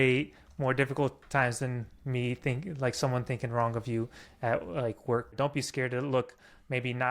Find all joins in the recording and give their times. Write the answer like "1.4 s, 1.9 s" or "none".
5.3 s